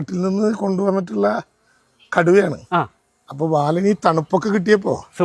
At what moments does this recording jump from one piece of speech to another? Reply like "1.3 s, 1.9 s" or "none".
none